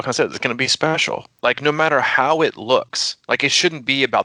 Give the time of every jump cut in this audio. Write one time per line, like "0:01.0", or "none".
none